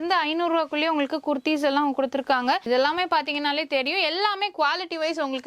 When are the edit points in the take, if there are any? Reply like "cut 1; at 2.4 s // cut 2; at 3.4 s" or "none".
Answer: cut 1; at 2.6 s